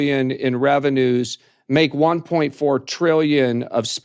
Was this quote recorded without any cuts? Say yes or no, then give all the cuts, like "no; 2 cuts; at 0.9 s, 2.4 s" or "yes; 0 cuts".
yes; 0 cuts